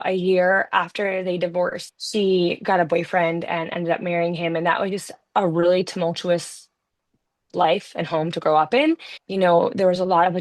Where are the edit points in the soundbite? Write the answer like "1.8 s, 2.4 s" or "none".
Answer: 1.9 s, 9.1 s